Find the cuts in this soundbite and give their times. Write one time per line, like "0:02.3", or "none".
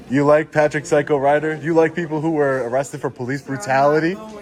none